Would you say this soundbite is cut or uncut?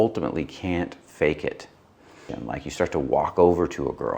cut